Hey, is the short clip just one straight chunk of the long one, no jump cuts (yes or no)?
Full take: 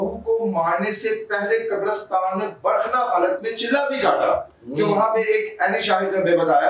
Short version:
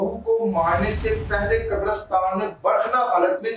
yes